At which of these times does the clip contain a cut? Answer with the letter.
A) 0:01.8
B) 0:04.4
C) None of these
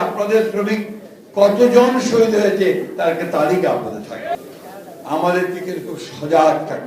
B